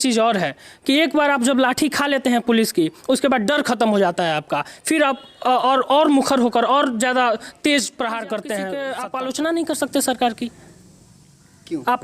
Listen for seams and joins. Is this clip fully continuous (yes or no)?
no